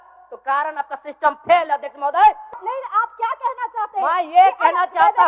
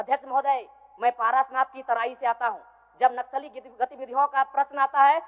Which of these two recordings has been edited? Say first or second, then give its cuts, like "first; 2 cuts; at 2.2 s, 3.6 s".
first; 1 cut; at 2.6 s